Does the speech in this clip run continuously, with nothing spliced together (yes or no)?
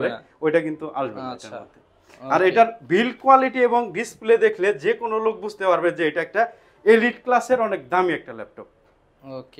yes